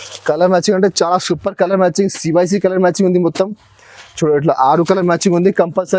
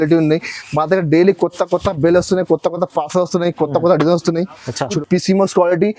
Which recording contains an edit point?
second; 1 cut; at 5.0 s

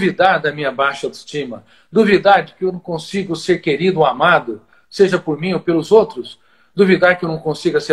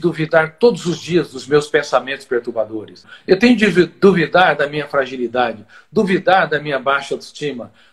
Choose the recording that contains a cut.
second; 1 cut; at 3.1 s

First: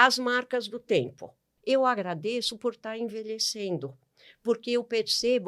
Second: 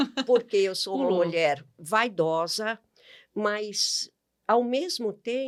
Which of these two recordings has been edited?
first; 1 cut; at 1.5 s

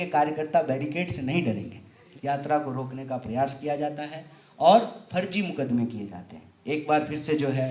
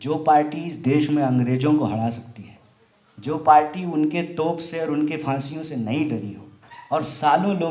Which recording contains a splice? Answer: first; 1 cut; at 2.0 s

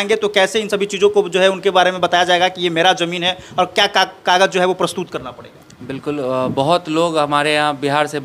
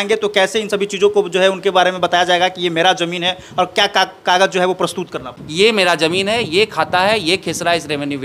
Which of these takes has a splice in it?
second; 1 cut; at 5.4 s

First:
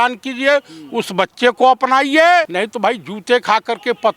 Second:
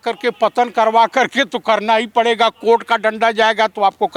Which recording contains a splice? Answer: first; 1 cut; at 2.5 s

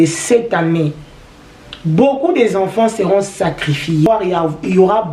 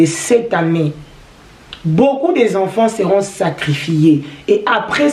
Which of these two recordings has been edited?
first; 1 cut; at 4.1 s

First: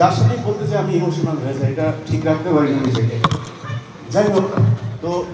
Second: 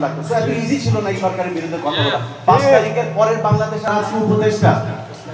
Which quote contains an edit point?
second; 1 cut; at 3.9 s

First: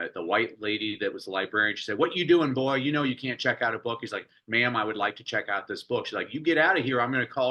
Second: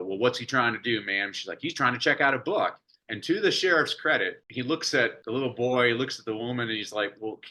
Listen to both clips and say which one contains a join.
second; 2 cuts; at 4.4 s, 5.2 s

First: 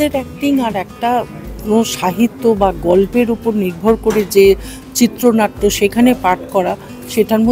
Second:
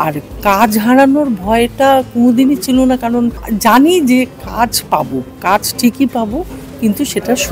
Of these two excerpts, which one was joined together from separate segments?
second; 1 cut; at 3.4 s

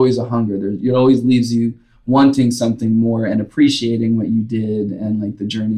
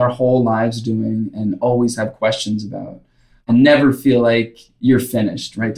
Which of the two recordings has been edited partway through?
second; 2 cuts; at 3.4 s, 4.6 s

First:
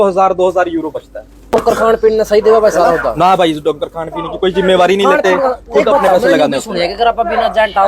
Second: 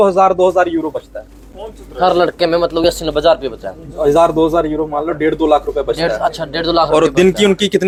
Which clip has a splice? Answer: first; 1 cut; at 1.5 s

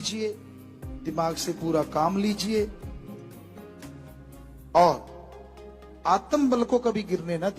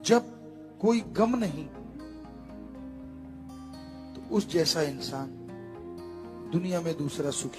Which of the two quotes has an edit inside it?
first; 2 cuts; at 2.7 s, 4.1 s

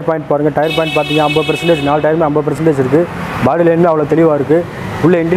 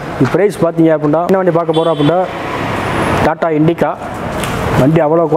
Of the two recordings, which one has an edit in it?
second; 1 cut; at 1.2 s

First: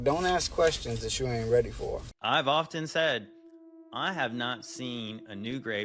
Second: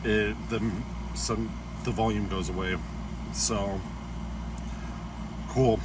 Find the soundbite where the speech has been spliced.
first; 1 cut; at 2.1 s

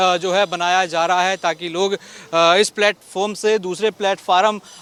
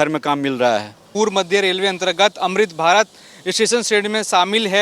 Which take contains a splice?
second; 1 cut; at 1.0 s

